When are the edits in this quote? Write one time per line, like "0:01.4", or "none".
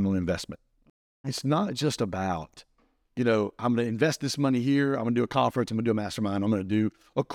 0:01.3